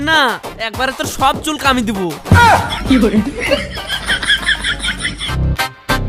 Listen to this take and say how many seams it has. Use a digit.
0